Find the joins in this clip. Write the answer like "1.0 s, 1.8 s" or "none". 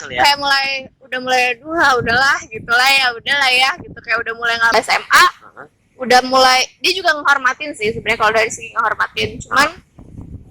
4.7 s